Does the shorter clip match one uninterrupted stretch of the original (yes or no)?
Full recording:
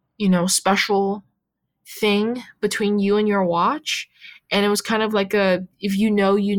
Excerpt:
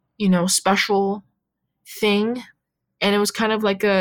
no